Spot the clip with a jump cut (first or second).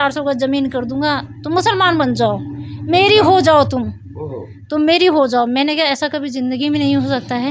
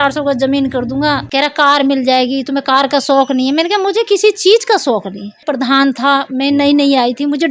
second